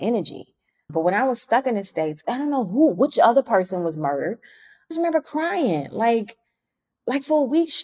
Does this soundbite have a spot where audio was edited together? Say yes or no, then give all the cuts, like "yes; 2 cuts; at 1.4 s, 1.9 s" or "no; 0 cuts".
yes; 2 cuts; at 2.2 s, 4.9 s